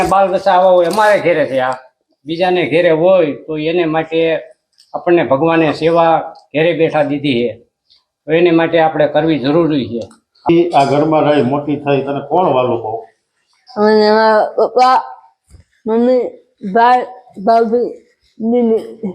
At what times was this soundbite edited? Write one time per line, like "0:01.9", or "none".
0:10.5